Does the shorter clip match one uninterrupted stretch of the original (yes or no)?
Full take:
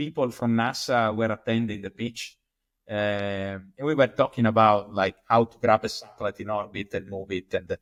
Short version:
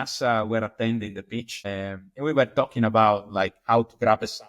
no